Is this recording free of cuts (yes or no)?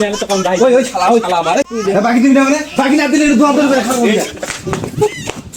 yes